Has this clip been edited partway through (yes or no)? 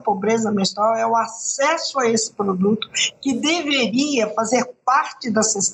no